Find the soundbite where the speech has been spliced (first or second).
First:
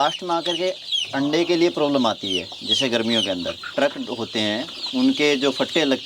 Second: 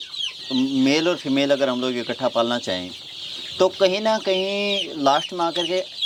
first